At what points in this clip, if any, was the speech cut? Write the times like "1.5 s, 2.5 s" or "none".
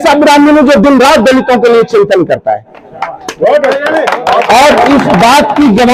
none